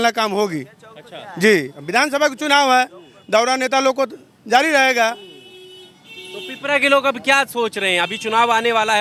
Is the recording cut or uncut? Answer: uncut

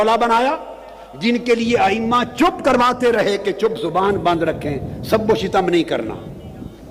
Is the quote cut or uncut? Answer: uncut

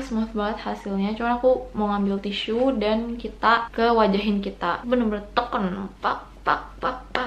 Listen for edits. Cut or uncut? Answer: cut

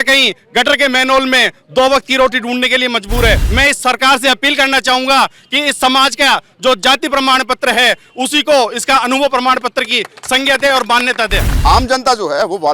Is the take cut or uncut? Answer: cut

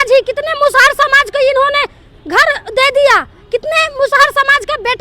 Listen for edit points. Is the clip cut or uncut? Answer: uncut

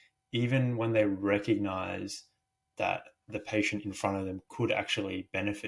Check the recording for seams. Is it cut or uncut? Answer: uncut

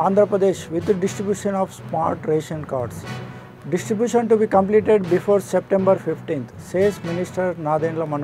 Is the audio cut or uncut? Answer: uncut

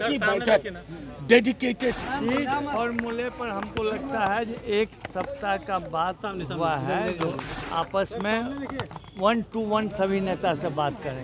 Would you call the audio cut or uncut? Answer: cut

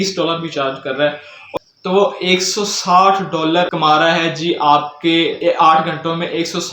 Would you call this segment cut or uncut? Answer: cut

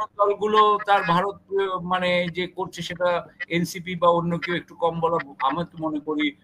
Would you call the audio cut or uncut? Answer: uncut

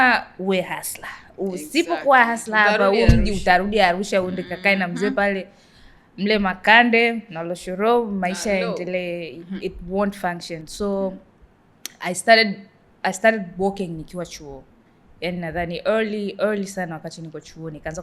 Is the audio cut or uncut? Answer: uncut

